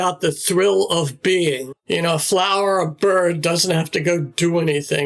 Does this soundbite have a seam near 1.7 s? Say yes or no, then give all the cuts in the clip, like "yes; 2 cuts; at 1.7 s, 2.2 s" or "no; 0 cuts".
yes; 1 cut; at 1.7 s